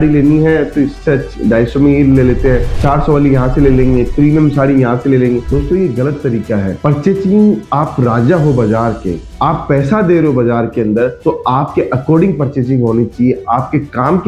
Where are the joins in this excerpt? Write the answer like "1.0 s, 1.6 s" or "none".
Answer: none